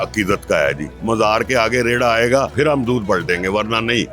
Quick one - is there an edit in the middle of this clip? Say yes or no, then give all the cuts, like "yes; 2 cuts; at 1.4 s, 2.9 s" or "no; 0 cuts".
yes; 2 cuts; at 0.9 s, 2.5 s